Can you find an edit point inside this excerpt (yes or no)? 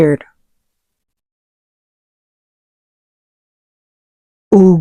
no